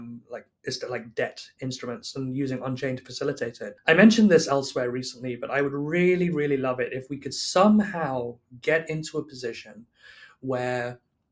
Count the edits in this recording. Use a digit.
1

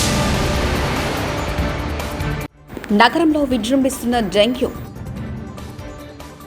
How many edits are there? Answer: 1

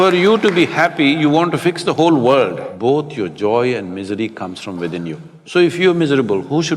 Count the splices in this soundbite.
2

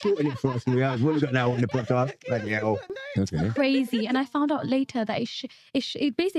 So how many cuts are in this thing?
1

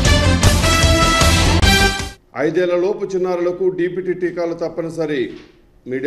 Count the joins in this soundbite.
1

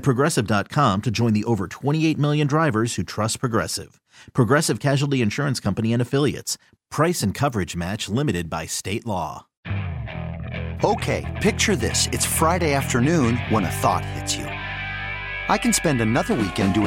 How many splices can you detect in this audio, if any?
1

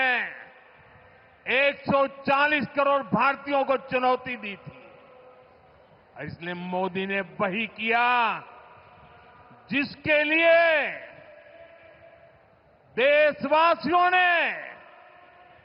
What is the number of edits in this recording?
0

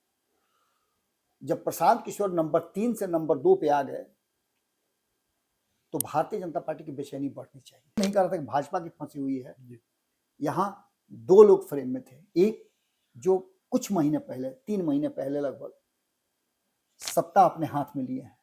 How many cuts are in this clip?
1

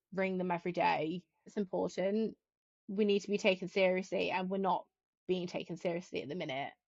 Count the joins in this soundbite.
1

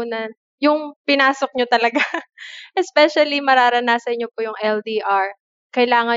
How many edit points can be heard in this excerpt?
1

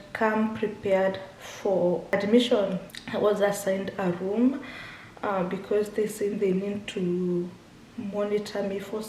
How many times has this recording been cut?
2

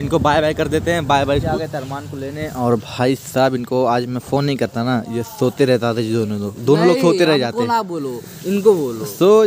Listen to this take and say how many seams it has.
0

